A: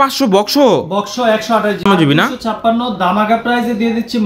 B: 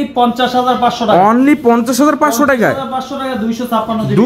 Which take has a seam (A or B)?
A